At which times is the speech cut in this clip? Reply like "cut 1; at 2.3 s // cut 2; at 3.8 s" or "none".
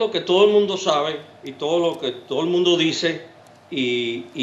cut 1; at 2.3 s